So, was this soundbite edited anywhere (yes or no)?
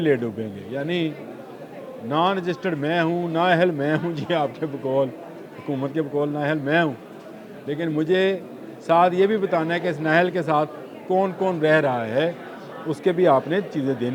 no